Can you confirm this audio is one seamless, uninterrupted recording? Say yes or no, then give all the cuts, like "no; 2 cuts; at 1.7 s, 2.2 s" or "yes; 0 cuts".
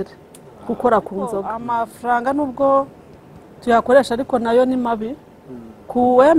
no; 1 cut; at 1.6 s